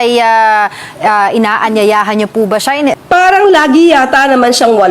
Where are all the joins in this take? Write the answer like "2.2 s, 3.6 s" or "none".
2.9 s